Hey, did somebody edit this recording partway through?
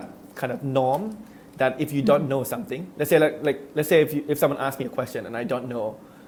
no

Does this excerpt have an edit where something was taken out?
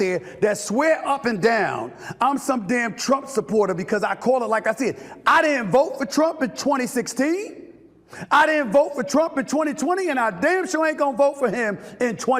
no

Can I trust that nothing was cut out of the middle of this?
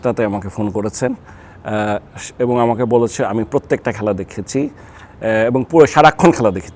yes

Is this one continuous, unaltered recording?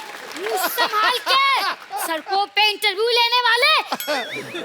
no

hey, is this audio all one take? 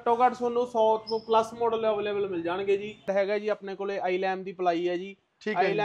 no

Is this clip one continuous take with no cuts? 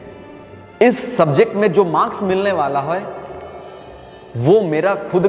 yes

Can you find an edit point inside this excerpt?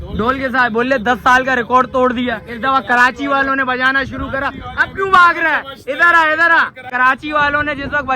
yes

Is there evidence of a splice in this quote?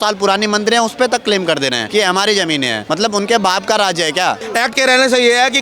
yes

